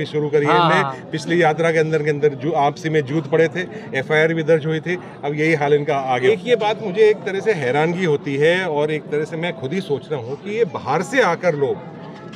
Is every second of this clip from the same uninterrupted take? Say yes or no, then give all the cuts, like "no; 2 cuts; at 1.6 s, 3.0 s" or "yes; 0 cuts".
no; 1 cut; at 6.2 s